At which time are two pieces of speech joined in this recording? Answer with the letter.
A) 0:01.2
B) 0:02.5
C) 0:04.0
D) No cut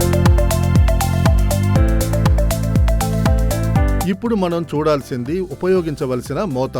C